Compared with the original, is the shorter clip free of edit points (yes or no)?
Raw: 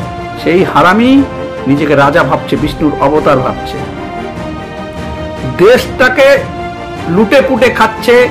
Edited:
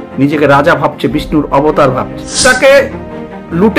no